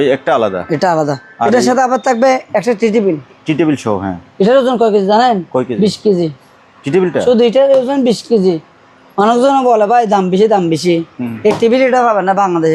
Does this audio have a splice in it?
no; 0 cuts

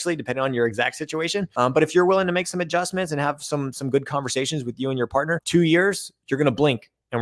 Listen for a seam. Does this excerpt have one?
yes; 2 cuts; at 1.5 s, 5.4 s

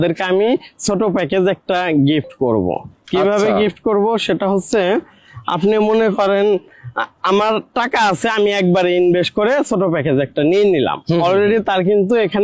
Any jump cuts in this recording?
no; 0 cuts

